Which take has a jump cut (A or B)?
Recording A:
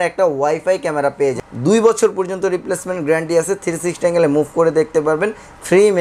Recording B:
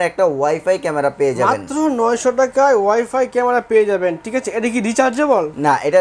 A